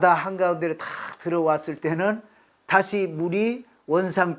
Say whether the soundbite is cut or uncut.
uncut